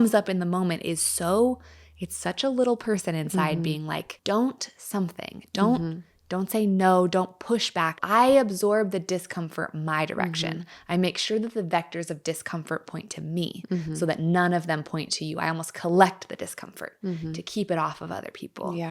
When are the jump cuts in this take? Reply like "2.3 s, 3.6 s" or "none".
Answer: 4.1 s, 8.0 s